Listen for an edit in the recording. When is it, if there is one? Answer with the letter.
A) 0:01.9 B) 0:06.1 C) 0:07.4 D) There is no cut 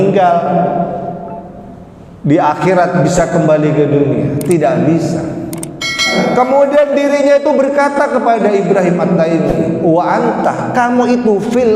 B